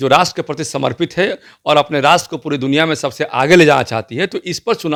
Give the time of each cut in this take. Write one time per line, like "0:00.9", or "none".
none